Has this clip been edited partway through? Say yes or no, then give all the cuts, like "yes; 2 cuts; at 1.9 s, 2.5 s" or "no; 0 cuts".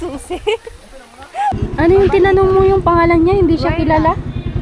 yes; 1 cut; at 1.6 s